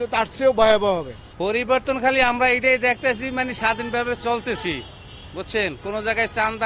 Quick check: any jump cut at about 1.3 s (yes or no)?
yes